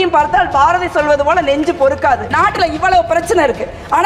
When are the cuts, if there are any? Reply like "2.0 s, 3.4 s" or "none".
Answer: 2.3 s